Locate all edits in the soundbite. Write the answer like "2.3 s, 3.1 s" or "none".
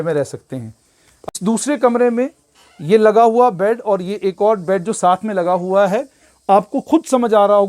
1.3 s